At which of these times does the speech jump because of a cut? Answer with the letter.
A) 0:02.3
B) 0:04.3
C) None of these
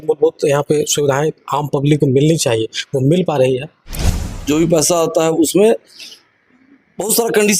B